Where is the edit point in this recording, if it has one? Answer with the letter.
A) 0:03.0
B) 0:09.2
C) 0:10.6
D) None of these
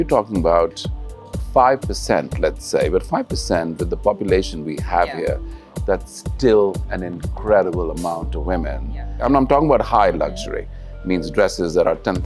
B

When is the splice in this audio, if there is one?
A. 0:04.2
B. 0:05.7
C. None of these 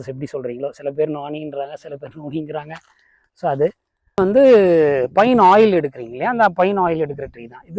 A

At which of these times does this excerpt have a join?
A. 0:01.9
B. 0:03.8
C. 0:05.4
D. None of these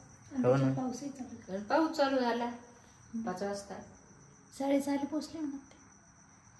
D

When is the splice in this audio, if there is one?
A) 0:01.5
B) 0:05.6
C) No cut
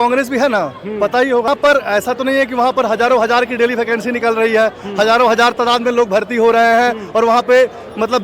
A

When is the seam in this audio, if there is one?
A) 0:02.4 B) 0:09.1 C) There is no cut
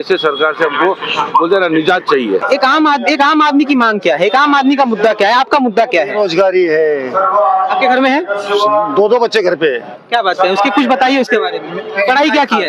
A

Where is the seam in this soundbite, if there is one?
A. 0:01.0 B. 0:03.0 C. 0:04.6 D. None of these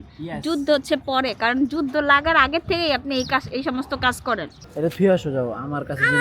C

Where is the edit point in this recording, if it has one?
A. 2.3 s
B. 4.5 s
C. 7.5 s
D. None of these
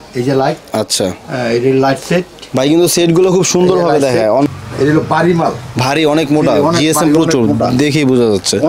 B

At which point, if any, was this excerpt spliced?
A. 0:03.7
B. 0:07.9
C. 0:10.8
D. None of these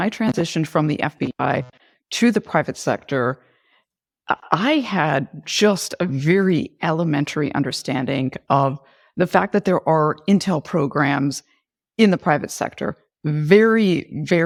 D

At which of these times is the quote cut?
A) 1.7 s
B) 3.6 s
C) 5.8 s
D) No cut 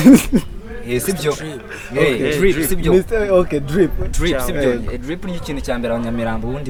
D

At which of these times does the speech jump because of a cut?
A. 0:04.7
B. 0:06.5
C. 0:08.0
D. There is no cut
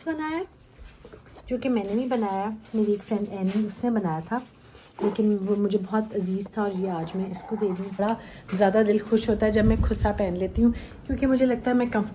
C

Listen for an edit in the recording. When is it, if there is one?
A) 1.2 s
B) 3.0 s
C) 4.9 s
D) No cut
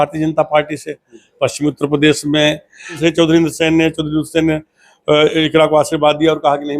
B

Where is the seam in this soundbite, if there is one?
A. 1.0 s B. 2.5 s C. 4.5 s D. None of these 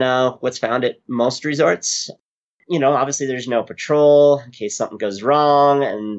B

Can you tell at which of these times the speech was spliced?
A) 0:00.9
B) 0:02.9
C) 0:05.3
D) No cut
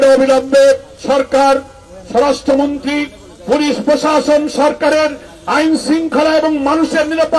A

